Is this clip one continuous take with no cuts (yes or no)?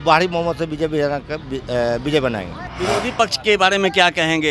no